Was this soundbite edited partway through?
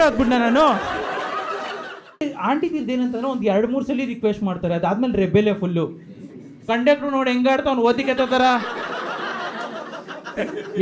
yes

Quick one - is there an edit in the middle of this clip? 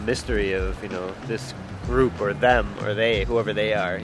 no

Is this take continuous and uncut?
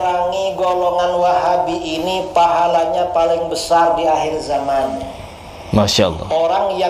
yes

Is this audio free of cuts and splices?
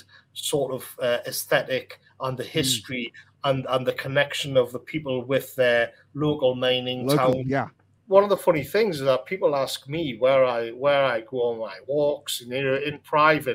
no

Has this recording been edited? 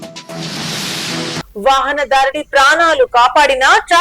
yes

